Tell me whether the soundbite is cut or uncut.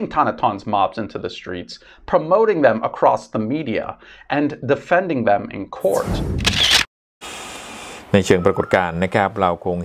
uncut